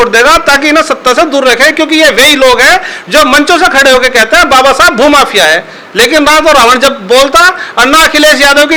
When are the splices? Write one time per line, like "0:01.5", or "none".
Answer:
none